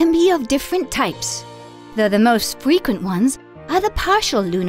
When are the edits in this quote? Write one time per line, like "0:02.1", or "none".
0:03.5